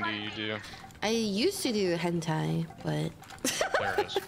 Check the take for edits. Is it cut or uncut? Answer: uncut